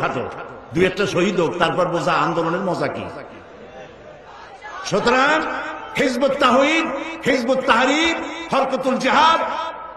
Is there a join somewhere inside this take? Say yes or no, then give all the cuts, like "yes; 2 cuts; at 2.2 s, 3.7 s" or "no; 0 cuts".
yes; 1 cut; at 4.6 s